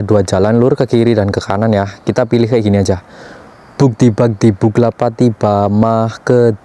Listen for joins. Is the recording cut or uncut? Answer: uncut